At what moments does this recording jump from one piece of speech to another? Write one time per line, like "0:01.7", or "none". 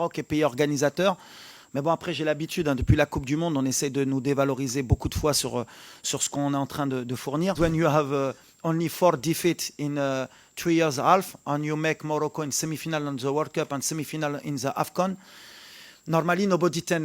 0:07.6